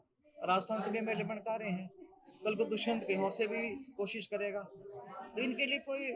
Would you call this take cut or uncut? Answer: uncut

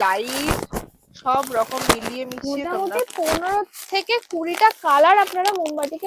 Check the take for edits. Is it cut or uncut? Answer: uncut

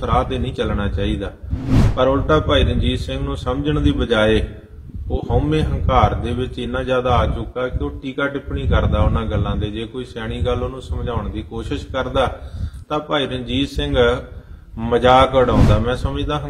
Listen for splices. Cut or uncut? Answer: uncut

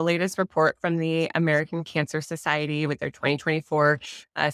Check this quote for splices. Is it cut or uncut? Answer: uncut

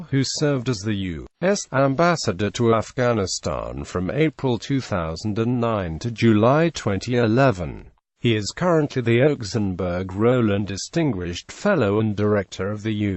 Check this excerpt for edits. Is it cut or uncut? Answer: cut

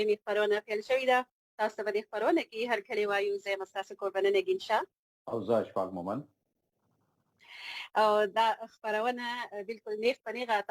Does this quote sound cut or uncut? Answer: uncut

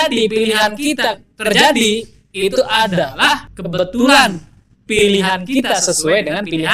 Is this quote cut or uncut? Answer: cut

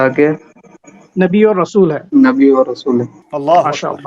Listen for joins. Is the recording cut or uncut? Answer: cut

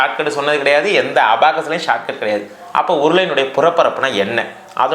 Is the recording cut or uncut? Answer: uncut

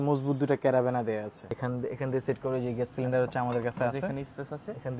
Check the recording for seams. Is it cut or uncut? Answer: cut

